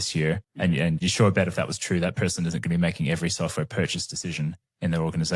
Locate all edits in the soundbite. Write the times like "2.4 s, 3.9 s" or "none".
1.0 s